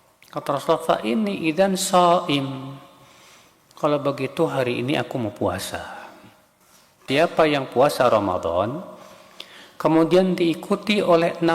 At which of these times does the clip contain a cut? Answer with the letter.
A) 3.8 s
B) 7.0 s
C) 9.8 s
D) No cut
B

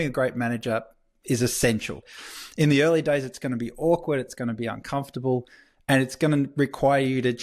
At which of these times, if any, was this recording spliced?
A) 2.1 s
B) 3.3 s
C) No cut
A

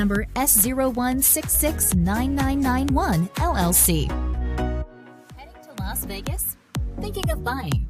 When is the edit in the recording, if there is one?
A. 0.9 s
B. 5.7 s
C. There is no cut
B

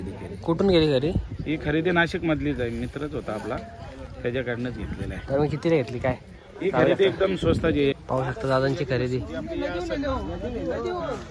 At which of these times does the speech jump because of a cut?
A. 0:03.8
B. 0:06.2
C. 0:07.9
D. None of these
C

